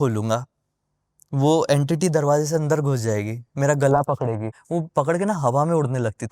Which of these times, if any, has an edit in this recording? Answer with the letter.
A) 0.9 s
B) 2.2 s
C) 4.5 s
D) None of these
C